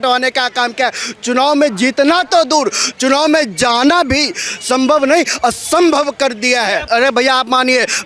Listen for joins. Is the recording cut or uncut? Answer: cut